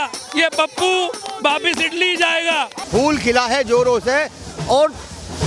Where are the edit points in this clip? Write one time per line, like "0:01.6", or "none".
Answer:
0:02.8